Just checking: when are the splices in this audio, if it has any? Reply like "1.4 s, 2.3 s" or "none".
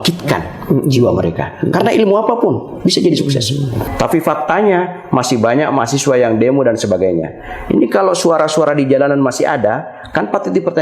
3.8 s